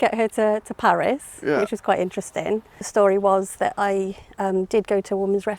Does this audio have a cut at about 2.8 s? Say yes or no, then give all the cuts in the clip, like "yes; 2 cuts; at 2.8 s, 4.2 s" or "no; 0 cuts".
yes; 1 cut; at 2.8 s